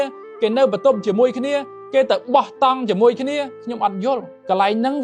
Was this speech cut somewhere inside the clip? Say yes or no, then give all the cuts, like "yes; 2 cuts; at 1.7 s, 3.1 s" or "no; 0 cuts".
no; 0 cuts